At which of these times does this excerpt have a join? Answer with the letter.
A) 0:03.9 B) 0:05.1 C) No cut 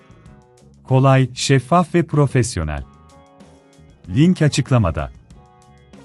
B